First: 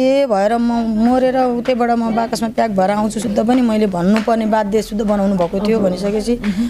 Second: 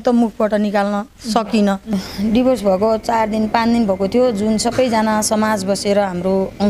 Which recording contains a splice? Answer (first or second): second